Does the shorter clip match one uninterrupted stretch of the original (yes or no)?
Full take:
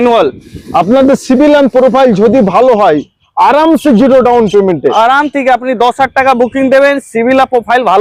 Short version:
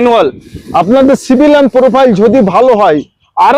yes